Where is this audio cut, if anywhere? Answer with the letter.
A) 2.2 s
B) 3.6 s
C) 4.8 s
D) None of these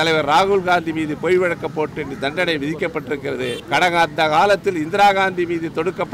B